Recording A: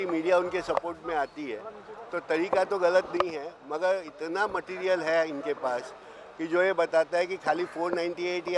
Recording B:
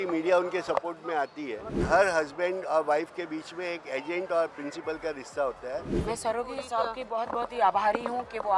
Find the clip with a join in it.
B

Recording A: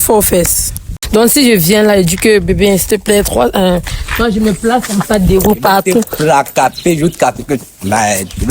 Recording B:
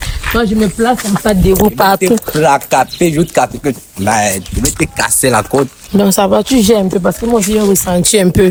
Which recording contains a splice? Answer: A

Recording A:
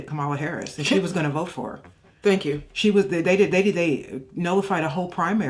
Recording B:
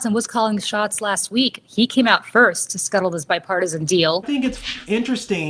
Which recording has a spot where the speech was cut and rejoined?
B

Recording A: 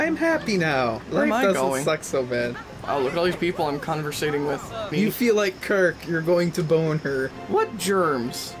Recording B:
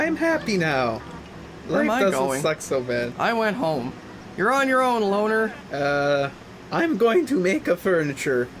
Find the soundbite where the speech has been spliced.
A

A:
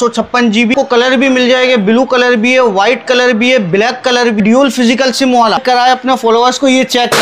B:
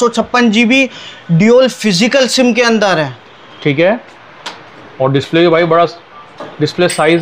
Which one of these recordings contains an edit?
A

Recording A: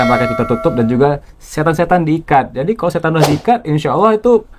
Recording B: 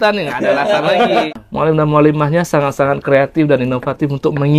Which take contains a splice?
B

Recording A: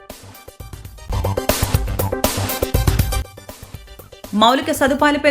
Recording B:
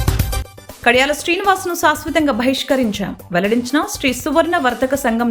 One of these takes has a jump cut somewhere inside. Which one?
A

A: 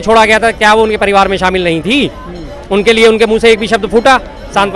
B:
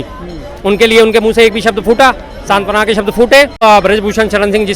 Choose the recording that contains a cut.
B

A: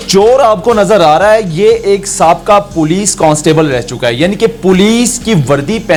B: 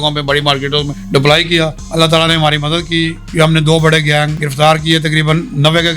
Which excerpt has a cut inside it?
B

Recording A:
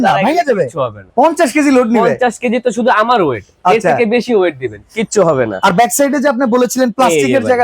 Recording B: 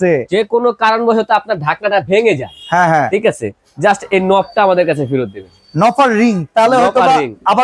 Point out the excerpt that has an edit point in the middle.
A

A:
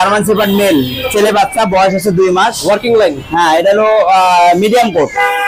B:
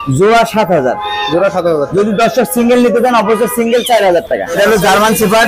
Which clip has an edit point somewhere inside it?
B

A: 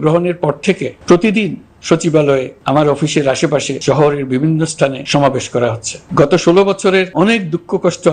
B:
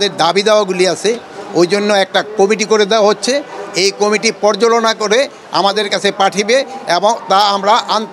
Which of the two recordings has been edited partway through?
A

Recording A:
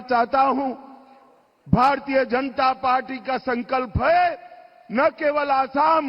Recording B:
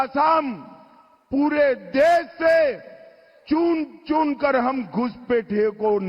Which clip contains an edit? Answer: B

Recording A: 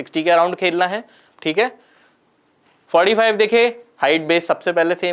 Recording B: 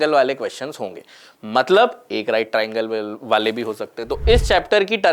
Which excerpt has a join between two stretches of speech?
B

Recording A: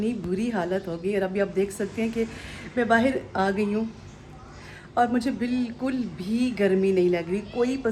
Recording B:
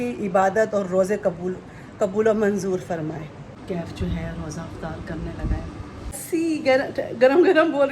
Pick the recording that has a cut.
B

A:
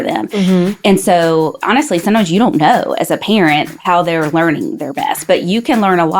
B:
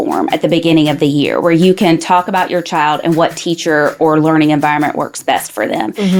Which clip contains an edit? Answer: A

